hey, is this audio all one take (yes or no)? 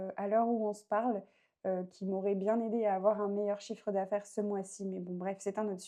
yes